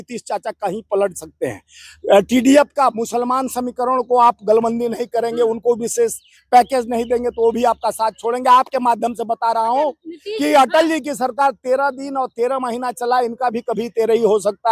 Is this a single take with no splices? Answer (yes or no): yes